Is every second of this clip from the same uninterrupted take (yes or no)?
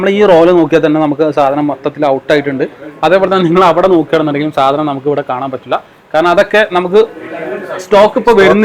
yes